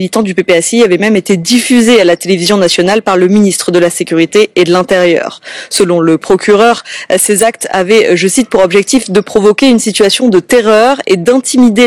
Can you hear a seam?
no; 0 cuts

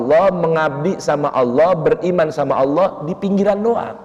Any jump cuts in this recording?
no; 0 cuts

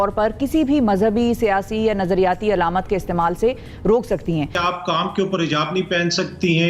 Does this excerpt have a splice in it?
yes; 1 cut; at 4.5 s

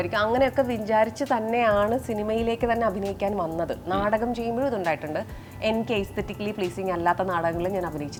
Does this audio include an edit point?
no; 0 cuts

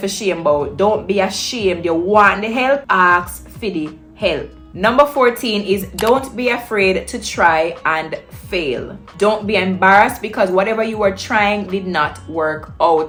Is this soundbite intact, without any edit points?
yes; 0 cuts

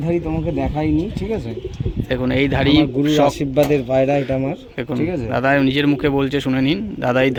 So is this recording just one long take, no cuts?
yes; 0 cuts

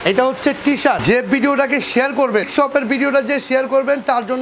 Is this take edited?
yes; 2 cuts; at 1.0 s, 2.5 s

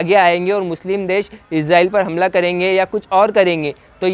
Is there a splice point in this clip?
no; 0 cuts

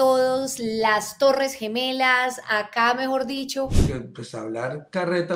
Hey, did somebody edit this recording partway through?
yes; 1 cut; at 3.8 s

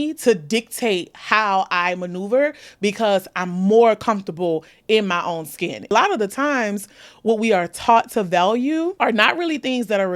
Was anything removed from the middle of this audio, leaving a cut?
yes; 2 cuts; at 5.9 s, 8.9 s

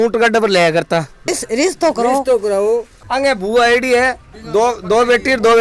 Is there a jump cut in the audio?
yes; 2 cuts; at 1.4 s, 3.0 s

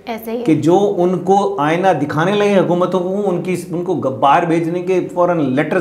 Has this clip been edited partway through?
no; 0 cuts

